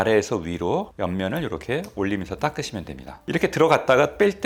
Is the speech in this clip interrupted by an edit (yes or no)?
no